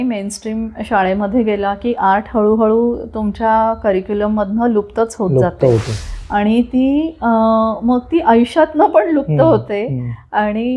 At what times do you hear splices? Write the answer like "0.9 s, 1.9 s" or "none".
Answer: none